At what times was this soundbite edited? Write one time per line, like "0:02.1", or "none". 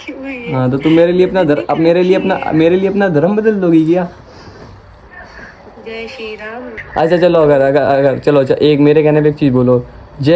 0:06.8